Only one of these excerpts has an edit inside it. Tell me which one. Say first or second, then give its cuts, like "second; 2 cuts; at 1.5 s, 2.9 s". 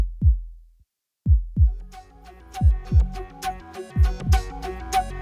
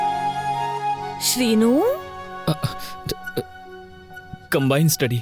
first; 1 cut; at 1.6 s